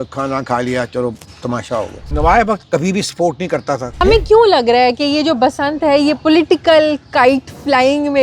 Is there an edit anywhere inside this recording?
yes; 2 cuts; at 2.0 s, 4.0 s

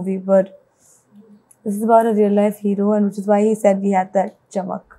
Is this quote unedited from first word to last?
yes; 0 cuts

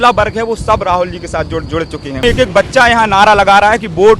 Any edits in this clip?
yes; 1 cut; at 2.2 s

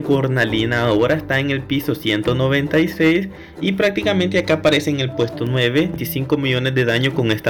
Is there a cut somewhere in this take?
yes; 1 cut; at 6.0 s

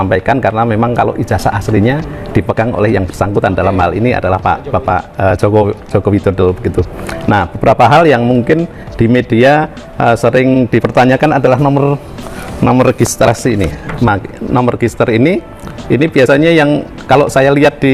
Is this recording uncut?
yes; 0 cuts

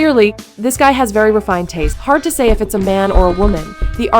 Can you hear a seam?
yes; 1 cut; at 1.9 s

